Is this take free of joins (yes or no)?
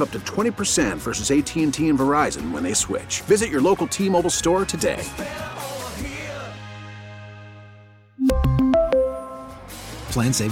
yes